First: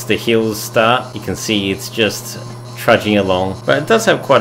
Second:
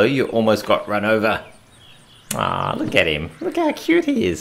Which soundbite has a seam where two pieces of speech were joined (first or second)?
first